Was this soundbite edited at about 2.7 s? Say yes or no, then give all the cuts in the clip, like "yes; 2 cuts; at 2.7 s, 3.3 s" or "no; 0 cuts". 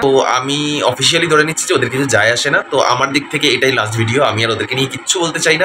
no; 0 cuts